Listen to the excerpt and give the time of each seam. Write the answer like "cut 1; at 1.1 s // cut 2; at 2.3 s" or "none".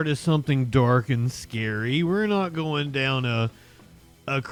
none